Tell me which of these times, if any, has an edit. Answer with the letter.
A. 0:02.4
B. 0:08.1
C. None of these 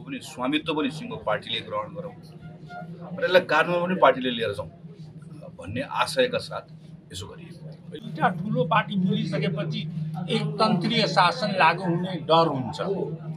B